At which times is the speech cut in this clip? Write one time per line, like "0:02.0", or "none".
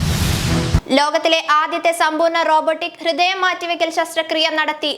none